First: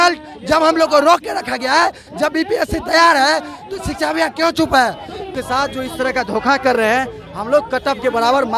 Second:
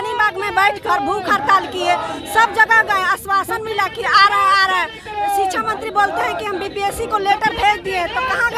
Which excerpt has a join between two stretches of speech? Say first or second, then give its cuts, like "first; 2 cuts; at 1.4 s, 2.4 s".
first; 1 cut; at 5.4 s